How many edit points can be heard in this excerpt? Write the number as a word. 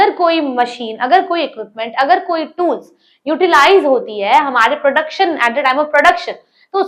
zero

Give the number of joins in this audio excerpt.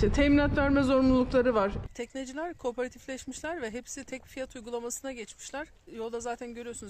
one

